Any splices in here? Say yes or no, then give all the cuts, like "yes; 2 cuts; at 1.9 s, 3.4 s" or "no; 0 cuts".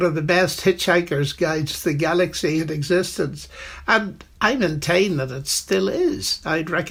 no; 0 cuts